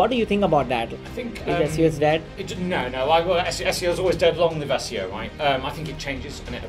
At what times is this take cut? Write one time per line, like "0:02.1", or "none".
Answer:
0:00.9